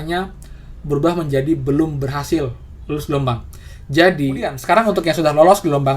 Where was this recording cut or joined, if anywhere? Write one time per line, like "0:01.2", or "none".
0:04.6